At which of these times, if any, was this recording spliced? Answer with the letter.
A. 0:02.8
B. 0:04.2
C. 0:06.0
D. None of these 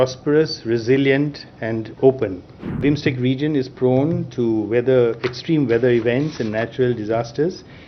A